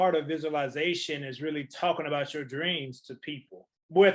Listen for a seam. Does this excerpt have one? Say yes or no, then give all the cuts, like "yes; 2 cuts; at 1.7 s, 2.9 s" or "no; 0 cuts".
no; 0 cuts